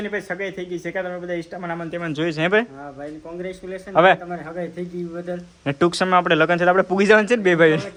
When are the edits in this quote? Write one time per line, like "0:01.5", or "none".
none